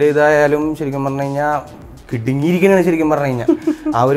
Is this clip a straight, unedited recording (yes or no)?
yes